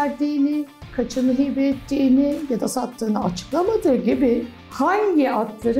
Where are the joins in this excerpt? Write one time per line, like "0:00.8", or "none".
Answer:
none